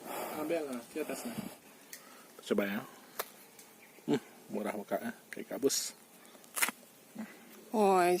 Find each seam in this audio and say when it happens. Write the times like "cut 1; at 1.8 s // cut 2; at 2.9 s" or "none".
cut 1; at 1.5 s